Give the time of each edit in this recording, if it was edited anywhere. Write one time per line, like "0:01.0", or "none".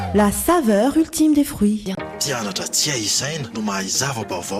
none